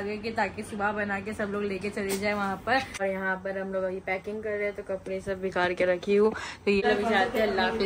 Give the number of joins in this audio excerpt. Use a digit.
2